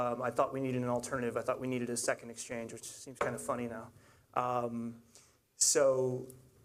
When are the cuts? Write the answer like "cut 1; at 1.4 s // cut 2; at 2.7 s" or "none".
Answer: cut 1; at 4.9 s